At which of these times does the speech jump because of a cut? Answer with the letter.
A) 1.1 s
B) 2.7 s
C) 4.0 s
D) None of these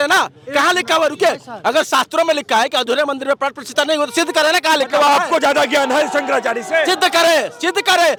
D